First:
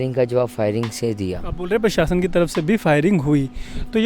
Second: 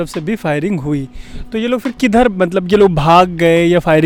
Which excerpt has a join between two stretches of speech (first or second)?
first